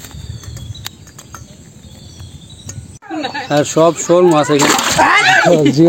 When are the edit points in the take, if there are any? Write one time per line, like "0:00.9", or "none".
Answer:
0:03.1